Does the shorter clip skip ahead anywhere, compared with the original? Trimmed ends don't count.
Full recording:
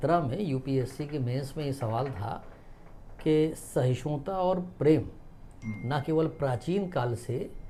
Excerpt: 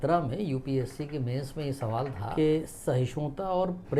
yes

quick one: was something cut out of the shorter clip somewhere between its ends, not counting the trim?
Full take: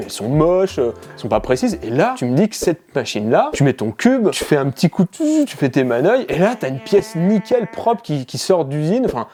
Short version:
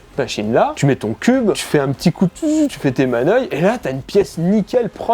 no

